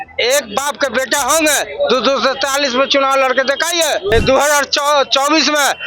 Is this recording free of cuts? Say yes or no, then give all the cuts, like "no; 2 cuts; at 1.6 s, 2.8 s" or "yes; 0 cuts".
no; 1 cut; at 4.1 s